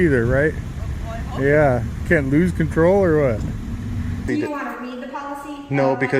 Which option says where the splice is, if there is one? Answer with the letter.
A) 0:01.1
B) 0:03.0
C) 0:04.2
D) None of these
C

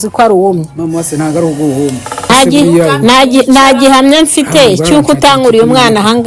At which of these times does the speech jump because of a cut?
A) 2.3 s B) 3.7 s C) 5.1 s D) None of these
A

